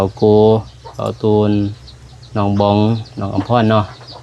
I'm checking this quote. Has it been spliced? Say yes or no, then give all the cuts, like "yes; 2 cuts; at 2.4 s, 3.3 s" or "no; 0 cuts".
no; 0 cuts